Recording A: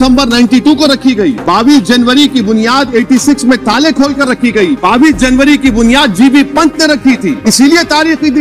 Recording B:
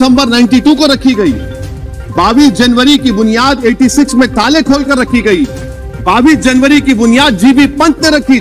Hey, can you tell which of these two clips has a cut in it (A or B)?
A